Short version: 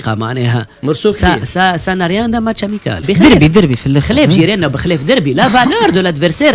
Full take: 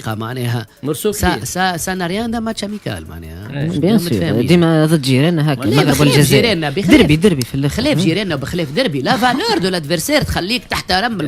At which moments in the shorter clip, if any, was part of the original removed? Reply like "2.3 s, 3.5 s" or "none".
3.0 s